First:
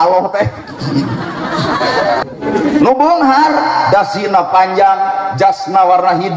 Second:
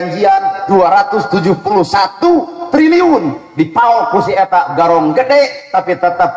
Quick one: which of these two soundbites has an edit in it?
first; 1 cut; at 2.2 s

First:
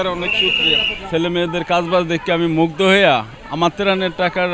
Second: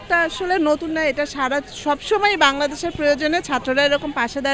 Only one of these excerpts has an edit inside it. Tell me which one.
first; 1 cut; at 0.9 s

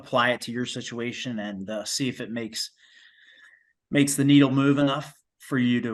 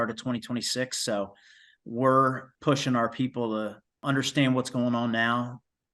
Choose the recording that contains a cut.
second; 2 cuts; at 2.5 s, 4.0 s

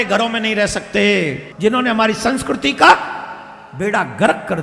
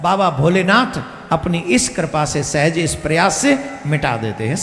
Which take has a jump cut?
first; 1 cut; at 1.4 s

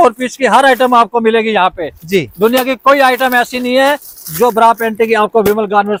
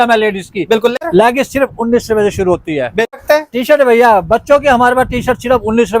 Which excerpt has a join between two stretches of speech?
second; 2 cuts; at 1.0 s, 3.1 s

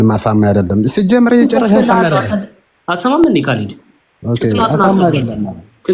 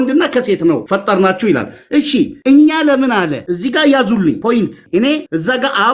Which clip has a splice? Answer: second; 4 cuts; at 0.8 s, 2.4 s, 3.4 s, 4.8 s

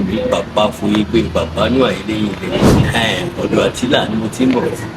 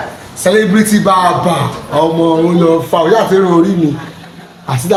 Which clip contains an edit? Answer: first; 1 cut; at 2.8 s

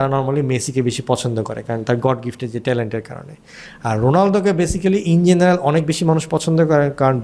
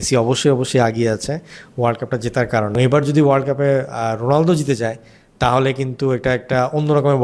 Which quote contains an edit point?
second; 1 cut; at 2.8 s

